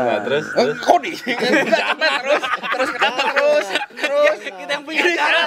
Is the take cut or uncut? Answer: uncut